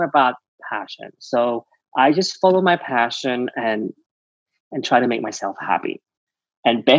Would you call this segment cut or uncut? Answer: uncut